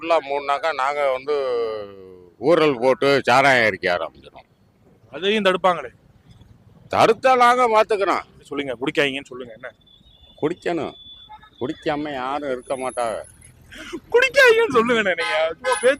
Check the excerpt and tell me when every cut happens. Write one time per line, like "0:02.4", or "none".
0:08.5